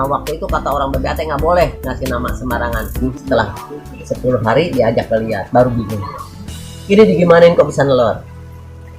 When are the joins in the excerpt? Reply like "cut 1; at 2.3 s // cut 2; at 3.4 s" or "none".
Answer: cut 1; at 3.1 s